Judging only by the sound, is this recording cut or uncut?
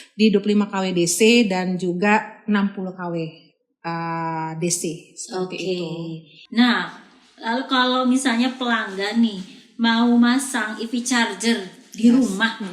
cut